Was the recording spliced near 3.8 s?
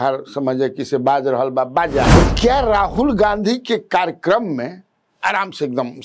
no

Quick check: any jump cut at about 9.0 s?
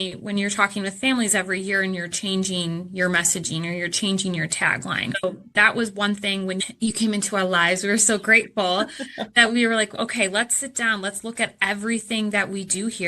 no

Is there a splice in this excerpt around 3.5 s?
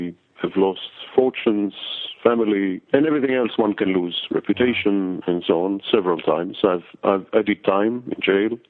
no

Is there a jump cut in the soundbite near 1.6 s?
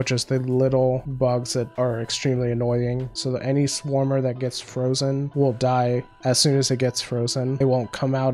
yes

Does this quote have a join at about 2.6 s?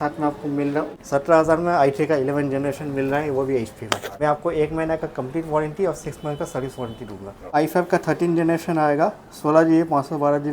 no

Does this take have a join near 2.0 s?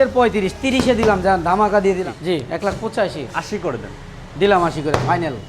yes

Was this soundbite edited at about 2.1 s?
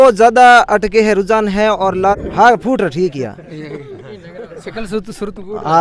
yes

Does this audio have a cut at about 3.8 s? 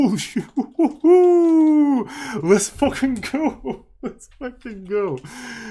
no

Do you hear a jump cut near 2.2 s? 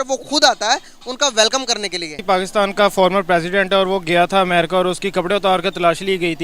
yes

